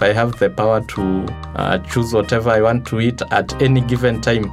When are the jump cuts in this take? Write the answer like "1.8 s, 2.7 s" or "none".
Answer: none